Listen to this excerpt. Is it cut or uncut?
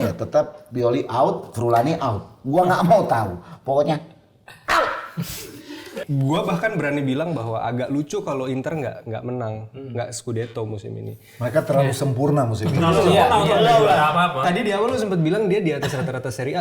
cut